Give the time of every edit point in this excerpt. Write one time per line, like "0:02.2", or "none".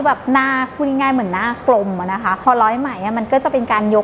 0:02.3